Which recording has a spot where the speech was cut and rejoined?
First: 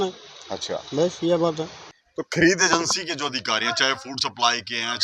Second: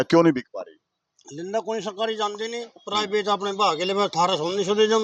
first; 1 cut; at 1.8 s

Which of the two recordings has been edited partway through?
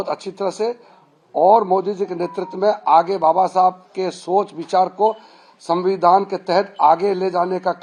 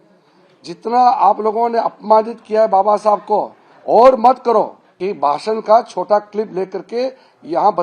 second; 1 cut; at 4.9 s

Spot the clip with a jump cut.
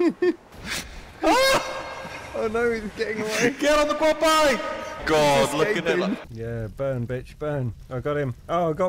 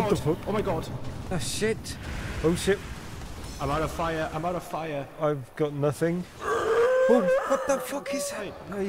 first; 2 cuts; at 4.9 s, 6.3 s

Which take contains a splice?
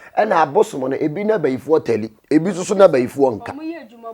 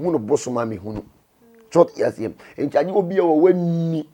first; 1 cut; at 2.1 s

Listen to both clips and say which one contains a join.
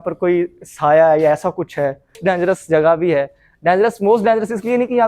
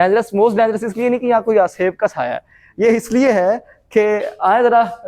first; 1 cut; at 2.2 s

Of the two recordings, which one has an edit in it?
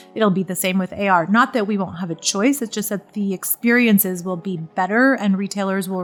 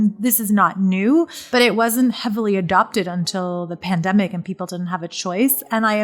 second; 1 cut; at 1.4 s

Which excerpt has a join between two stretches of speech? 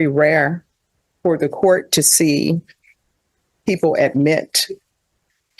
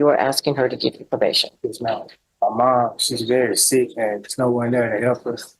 second; 1 cut; at 2.2 s

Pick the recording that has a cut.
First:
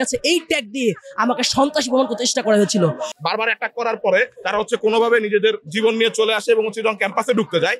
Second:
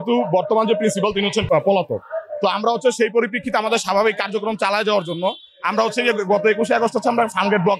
first; 1 cut; at 3.1 s

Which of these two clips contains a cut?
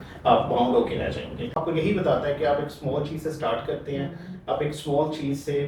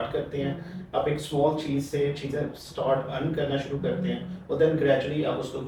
first; 1 cut; at 1.6 s

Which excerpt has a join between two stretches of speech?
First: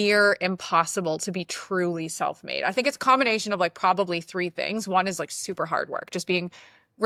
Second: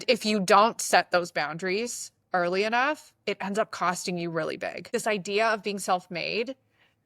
second; 1 cut; at 4.9 s

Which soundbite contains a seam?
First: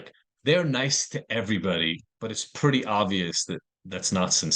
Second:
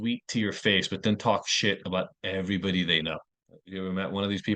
first; 1 cut; at 2.1 s

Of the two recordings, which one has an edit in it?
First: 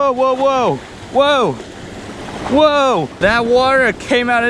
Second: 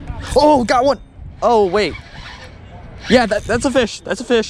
first; 1 cut; at 3.2 s

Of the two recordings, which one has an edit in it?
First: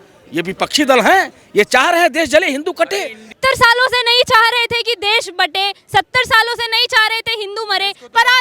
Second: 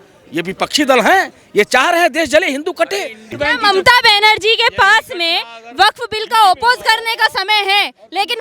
second; 1 cut; at 3.3 s

